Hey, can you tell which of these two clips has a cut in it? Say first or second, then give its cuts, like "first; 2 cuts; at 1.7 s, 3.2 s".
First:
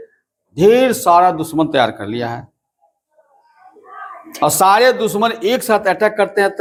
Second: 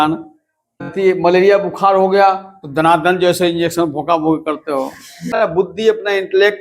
second; 2 cuts; at 0.9 s, 5.3 s